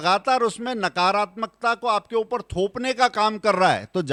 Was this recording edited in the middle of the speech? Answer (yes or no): no